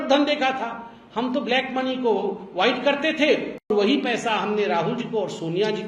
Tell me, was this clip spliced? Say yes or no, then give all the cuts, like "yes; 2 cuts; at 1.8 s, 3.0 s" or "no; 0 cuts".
yes; 1 cut; at 3.7 s